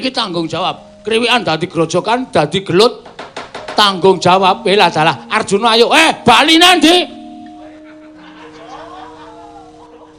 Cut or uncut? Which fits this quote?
uncut